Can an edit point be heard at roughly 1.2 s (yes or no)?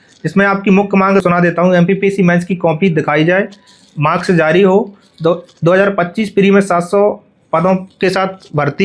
yes